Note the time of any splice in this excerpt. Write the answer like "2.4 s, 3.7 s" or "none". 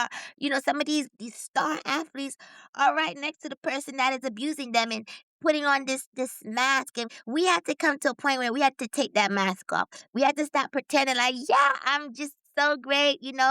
1.1 s, 7.1 s